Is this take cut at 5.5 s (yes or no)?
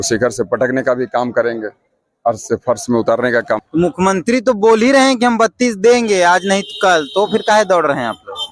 no